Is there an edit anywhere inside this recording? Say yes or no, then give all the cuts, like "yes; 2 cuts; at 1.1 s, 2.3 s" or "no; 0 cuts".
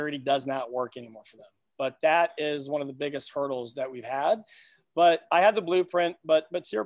no; 0 cuts